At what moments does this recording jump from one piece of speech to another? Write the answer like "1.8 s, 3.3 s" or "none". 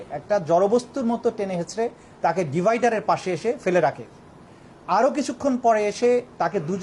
none